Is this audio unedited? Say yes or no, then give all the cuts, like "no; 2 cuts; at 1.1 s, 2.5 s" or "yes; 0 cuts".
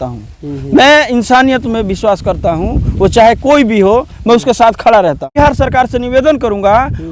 no; 1 cut; at 5.3 s